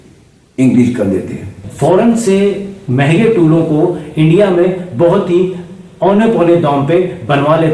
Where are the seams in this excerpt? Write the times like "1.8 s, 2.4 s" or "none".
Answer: 1.6 s